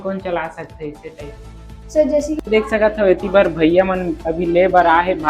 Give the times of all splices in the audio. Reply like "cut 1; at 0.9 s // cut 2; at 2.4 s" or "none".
cut 1; at 2.4 s